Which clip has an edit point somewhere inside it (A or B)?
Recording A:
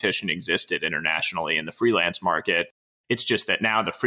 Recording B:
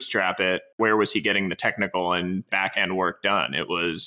B